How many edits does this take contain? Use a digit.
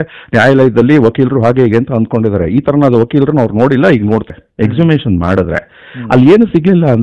1